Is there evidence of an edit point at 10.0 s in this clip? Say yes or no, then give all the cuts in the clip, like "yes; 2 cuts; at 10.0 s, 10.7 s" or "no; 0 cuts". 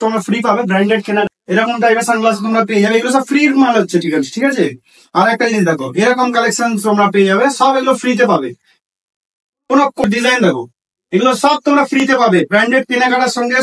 yes; 2 cuts; at 1.3 s, 10.0 s